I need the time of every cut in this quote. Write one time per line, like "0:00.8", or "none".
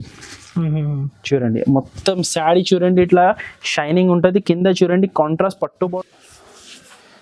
0:05.9